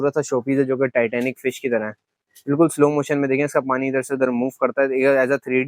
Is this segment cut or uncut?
uncut